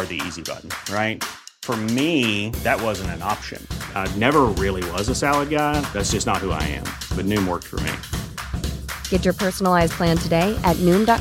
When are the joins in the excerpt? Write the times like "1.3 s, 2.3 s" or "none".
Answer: none